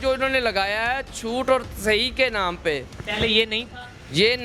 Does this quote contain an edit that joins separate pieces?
no; 0 cuts

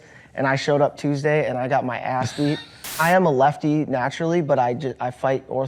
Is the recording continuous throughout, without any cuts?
no; 1 cut; at 3.0 s

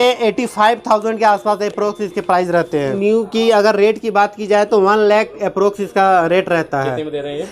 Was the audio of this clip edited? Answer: yes; 1 cut; at 2.9 s

